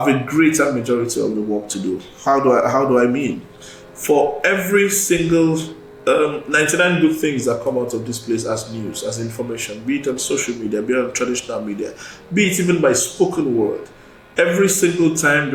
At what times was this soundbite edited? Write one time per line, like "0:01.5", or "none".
none